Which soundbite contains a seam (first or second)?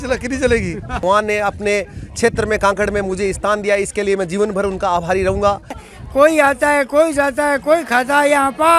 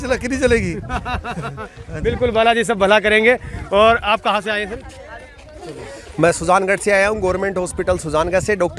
first